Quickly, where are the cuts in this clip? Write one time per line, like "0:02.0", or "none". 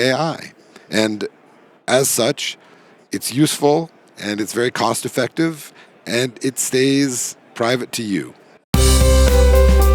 0:08.6